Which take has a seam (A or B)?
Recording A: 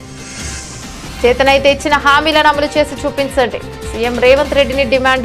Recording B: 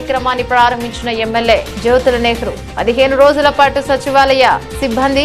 A